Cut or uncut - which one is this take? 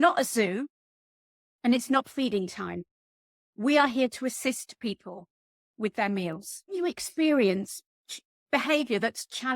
cut